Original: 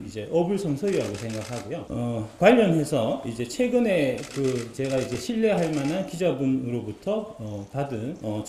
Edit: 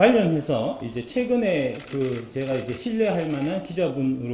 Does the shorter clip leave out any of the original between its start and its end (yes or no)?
no